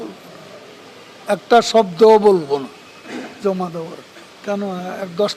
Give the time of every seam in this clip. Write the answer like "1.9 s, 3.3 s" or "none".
4.3 s

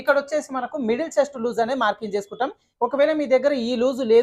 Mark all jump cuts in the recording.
2.6 s

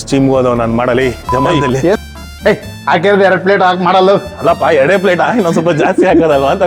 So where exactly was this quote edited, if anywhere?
2.0 s

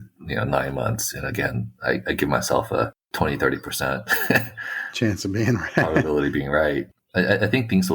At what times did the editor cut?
7.0 s

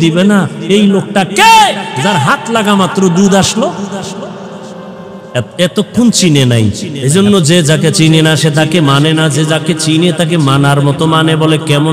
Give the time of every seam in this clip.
6.9 s

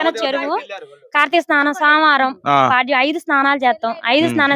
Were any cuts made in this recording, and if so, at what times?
none

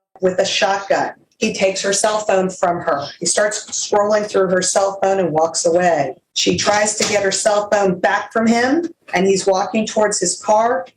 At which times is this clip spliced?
1.2 s, 6.2 s, 9.0 s

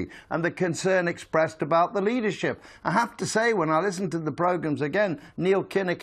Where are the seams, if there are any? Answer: 4.9 s

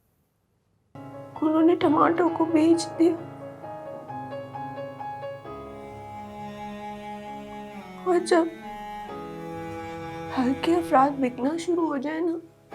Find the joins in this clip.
1.0 s

